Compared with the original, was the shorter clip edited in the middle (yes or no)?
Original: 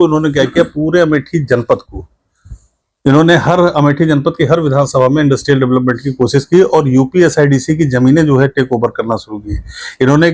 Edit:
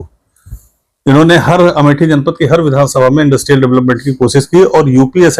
no